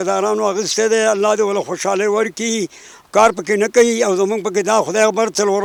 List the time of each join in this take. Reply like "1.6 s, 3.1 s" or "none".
none